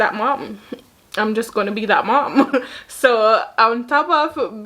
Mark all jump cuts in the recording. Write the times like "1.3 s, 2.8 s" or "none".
none